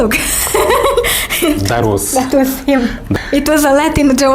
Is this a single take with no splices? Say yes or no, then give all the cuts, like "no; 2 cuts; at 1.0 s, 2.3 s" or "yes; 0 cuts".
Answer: no; 1 cut; at 3.1 s